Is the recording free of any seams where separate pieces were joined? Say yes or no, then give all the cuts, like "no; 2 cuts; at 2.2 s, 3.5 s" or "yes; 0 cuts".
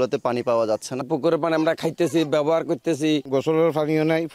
no; 2 cuts; at 0.9 s, 3.2 s